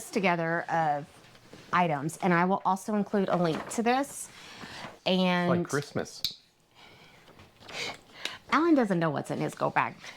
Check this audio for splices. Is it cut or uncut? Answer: uncut